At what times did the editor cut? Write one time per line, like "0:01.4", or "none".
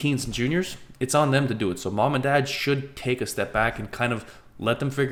none